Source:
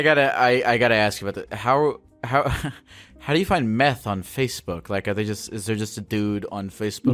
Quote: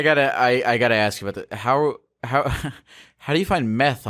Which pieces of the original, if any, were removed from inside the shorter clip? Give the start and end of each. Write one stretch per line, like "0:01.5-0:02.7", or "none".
none